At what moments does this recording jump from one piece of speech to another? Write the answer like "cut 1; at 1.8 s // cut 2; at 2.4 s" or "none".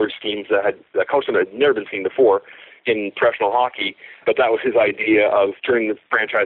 cut 1; at 4.2 s // cut 2; at 5.6 s